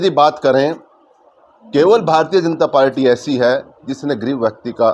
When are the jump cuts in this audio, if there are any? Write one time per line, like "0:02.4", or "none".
none